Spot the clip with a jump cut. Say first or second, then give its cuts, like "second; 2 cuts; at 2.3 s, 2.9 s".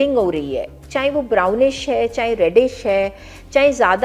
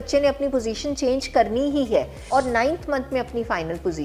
second; 1 cut; at 2.2 s